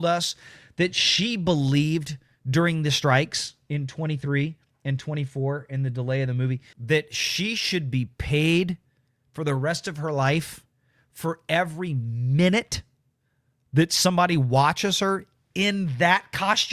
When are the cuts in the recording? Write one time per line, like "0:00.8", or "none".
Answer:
0:06.7